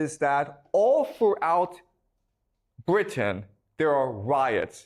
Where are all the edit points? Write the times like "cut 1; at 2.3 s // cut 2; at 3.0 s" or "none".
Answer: none